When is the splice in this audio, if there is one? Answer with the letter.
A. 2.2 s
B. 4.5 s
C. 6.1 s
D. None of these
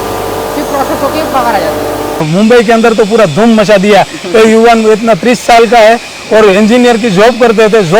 A